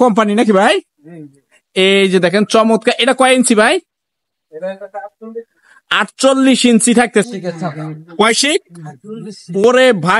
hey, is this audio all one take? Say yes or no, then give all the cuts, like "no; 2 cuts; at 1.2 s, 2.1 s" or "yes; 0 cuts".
no; 1 cut; at 7.2 s